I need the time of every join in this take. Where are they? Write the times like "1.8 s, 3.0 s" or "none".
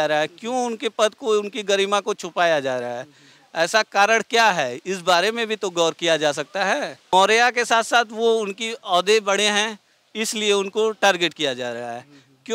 7.1 s